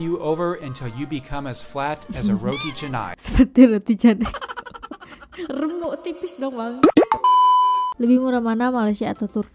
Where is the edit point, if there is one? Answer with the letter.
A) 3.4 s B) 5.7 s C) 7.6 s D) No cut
C